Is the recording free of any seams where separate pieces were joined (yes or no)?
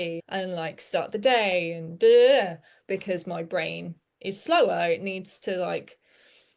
no